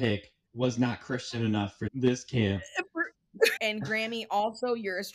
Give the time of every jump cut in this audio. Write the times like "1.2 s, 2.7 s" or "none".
1.8 s, 3.5 s